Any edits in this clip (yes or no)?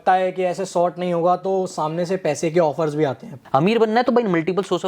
yes